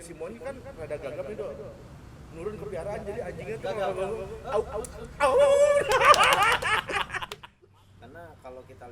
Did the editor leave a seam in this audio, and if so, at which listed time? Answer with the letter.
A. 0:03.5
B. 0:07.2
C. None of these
B